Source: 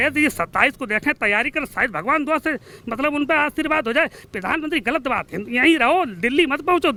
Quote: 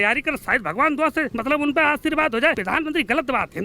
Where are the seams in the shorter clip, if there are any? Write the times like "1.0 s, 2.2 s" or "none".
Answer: 1.3 s, 2.6 s